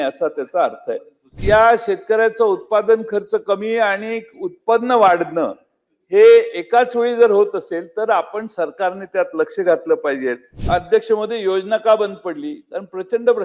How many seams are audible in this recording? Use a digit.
2